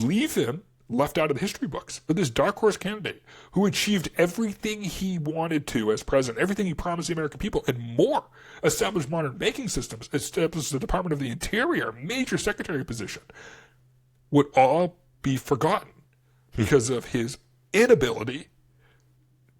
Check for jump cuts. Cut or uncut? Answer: cut